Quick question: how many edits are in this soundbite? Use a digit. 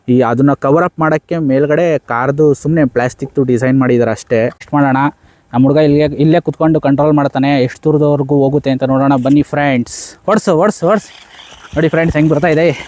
1